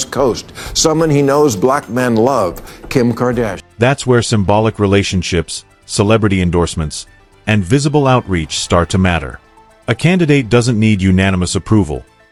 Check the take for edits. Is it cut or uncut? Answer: uncut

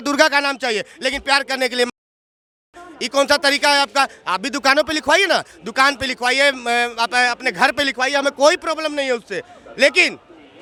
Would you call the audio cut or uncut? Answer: uncut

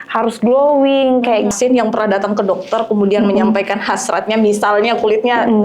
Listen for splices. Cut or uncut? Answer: cut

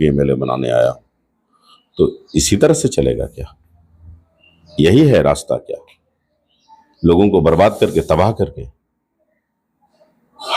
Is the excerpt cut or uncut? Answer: uncut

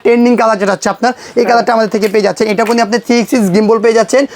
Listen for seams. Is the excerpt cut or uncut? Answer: uncut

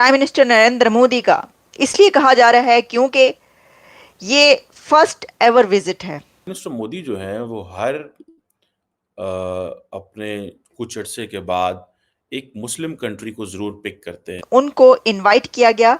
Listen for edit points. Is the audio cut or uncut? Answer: cut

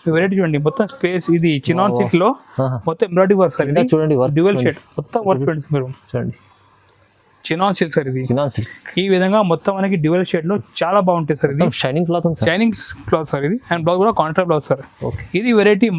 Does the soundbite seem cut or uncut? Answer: uncut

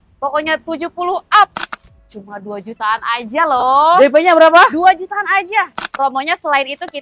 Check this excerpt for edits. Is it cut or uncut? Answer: cut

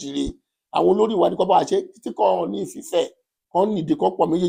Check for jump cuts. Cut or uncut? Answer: uncut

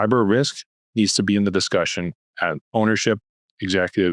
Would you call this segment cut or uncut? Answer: uncut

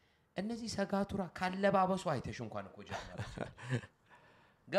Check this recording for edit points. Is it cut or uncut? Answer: uncut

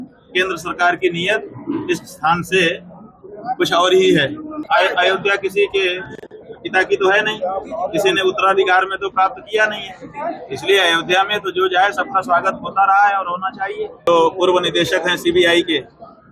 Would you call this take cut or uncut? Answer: cut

